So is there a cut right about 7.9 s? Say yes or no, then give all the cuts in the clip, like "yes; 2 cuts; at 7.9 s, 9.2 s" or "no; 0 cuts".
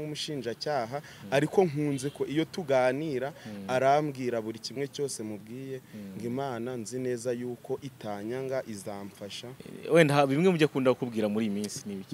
no; 1 cut; at 9.7 s